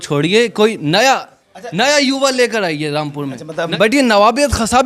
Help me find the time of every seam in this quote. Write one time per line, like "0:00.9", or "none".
0:03.7